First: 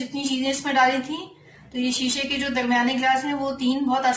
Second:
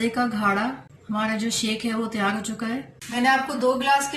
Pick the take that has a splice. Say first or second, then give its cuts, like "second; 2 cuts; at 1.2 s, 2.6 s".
second; 2 cuts; at 0.9 s, 3.0 s